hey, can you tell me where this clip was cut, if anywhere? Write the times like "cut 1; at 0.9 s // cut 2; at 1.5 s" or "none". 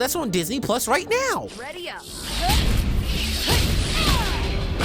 cut 1; at 1.5 s